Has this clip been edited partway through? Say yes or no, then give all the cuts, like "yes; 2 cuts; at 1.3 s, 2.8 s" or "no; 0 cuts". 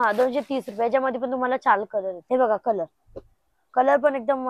yes; 1 cut; at 2.2 s